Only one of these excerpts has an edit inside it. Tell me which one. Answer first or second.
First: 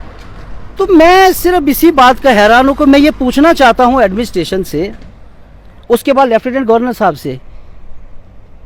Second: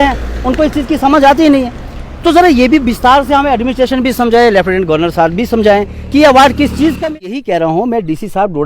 second